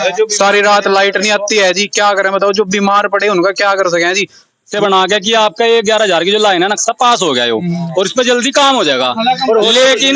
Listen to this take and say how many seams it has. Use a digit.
1